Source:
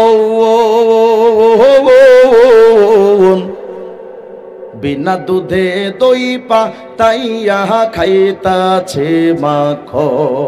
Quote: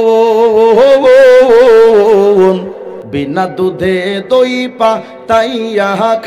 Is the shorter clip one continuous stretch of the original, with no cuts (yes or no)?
no